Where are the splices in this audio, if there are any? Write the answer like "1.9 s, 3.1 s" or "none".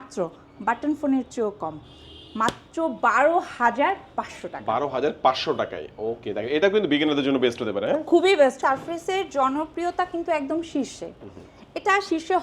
8.6 s